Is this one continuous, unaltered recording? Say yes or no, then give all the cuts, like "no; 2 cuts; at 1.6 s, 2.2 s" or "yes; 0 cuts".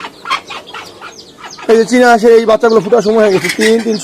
yes; 0 cuts